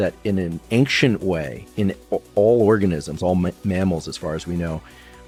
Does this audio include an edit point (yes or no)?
no